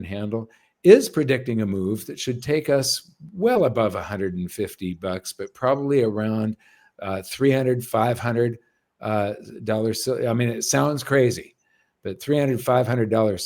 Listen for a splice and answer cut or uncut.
uncut